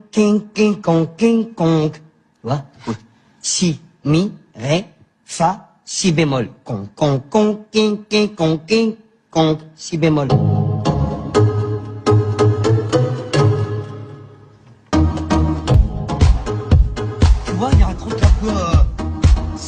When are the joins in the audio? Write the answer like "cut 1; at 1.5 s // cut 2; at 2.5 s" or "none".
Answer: cut 1; at 14.8 s